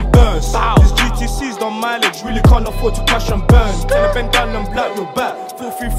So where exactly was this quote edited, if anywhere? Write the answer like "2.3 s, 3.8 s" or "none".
none